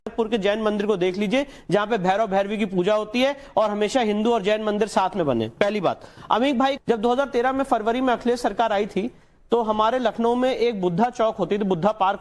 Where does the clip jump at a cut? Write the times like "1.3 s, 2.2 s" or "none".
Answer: 5.6 s, 6.8 s